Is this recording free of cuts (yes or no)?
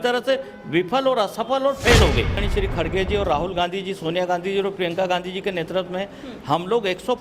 no